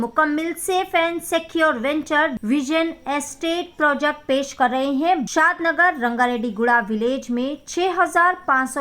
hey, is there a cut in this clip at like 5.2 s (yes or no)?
yes